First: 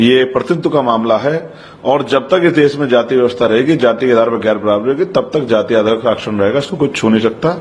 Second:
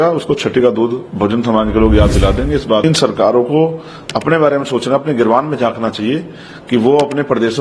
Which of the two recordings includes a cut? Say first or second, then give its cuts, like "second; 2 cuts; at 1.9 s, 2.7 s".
second; 1 cut; at 2.8 s